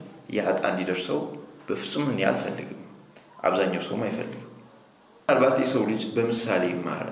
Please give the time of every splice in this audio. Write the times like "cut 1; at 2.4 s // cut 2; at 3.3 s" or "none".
cut 1; at 5.3 s